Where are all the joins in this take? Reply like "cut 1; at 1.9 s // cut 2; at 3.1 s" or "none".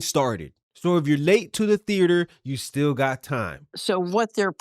cut 1; at 3.6 s